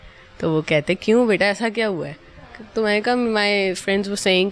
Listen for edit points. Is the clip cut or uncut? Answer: uncut